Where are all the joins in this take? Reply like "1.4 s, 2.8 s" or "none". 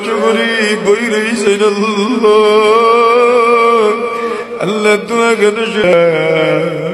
5.9 s